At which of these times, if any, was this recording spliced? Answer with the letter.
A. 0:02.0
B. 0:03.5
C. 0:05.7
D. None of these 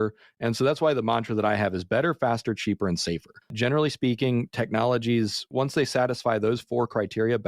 B